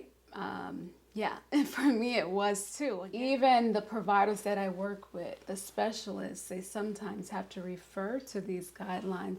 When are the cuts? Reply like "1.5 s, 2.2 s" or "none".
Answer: 3.0 s